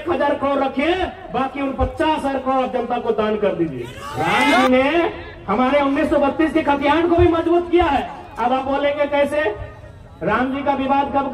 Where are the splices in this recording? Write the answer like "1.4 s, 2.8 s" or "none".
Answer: 4.6 s